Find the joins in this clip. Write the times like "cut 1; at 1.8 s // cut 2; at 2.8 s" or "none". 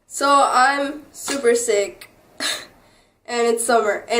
cut 1; at 1.3 s